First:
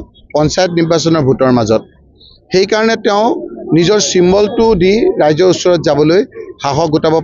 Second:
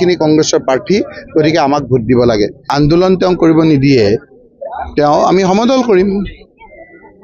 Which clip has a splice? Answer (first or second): second